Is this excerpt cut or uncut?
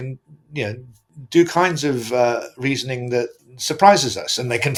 uncut